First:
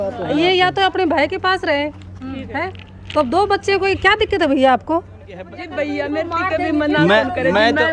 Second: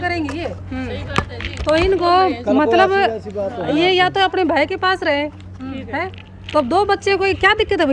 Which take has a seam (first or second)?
first